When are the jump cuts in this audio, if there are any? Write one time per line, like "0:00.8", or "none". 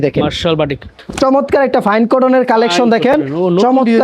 0:00.9